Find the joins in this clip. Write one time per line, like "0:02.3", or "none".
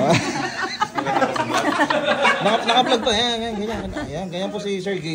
none